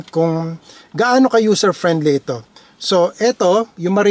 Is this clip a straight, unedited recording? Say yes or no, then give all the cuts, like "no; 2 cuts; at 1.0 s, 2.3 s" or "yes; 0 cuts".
yes; 0 cuts